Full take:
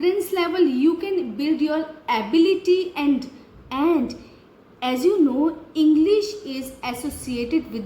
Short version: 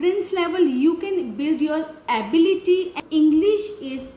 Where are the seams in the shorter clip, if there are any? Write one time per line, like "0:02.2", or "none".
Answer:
0:03.0